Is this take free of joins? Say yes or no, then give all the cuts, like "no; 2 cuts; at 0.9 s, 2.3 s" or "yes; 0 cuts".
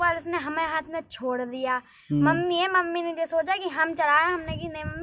yes; 0 cuts